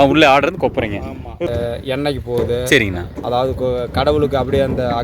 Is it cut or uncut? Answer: cut